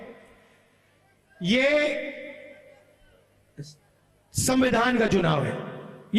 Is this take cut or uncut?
uncut